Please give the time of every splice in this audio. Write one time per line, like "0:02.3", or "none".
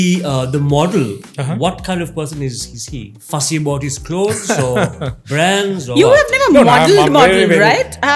none